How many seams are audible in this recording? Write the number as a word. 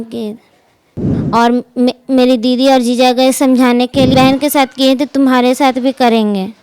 two